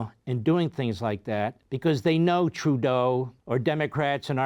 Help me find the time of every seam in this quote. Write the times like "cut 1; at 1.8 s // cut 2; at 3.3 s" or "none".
cut 1; at 1.6 s // cut 2; at 3.4 s